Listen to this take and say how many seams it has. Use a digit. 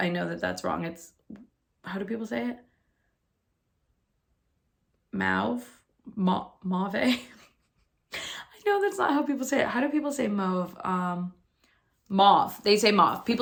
0